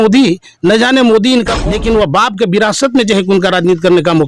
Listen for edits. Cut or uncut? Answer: cut